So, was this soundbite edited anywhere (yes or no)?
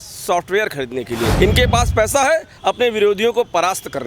yes